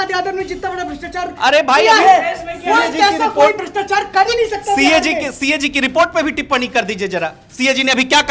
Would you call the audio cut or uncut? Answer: uncut